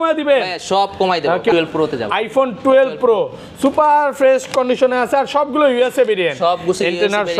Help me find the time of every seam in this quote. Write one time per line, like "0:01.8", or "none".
0:01.5